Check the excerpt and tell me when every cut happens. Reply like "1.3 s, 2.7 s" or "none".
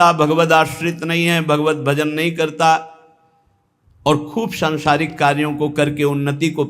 none